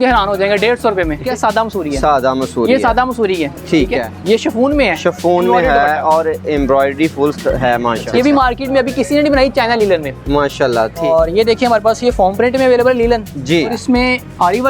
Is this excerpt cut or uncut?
cut